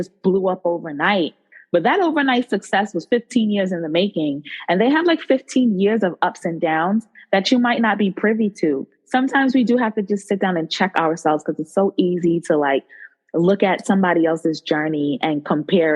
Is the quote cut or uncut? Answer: cut